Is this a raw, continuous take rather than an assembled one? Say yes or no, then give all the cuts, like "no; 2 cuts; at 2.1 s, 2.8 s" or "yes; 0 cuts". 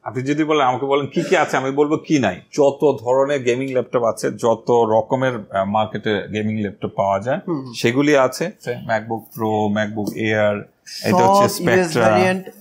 no; 2 cuts; at 2.4 s, 8.7 s